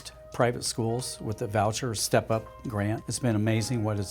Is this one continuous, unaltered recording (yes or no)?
no